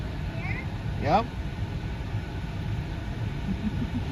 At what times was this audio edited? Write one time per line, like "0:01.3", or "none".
none